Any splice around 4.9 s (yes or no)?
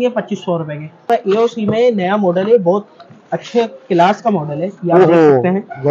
no